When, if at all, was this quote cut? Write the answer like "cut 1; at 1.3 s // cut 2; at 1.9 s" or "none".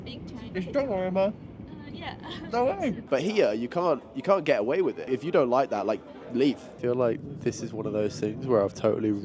cut 1; at 3.0 s // cut 2; at 5.0 s // cut 3; at 6.7 s